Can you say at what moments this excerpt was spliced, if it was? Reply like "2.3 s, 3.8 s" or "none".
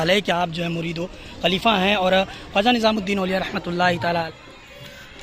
4.3 s